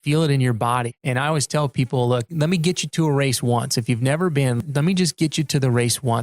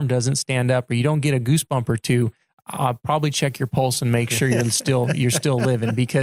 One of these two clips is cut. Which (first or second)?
first